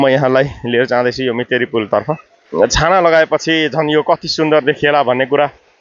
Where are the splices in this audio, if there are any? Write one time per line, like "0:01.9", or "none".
0:02.3

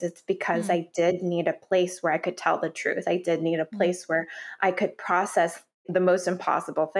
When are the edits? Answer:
0:05.9

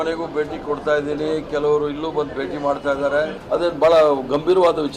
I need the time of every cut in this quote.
0:03.4

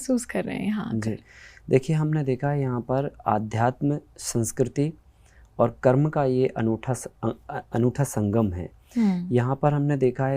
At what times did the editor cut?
none

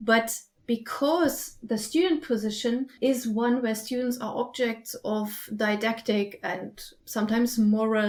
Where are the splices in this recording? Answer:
none

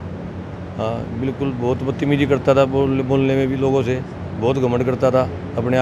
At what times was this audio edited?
none

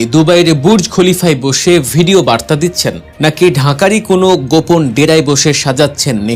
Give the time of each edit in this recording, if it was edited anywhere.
none

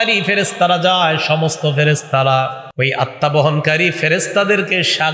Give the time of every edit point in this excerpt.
0:02.6

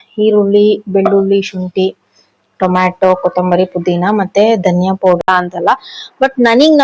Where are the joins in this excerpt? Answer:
0:05.2

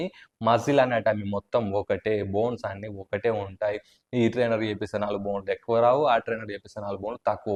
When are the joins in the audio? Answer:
none

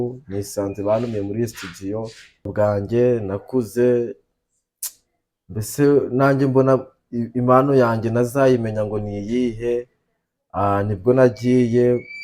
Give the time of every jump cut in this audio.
0:02.5

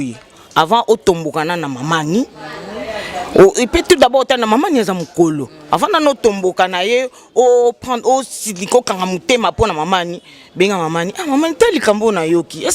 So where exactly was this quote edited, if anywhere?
none

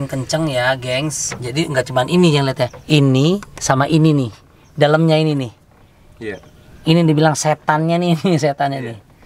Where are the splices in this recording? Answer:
none

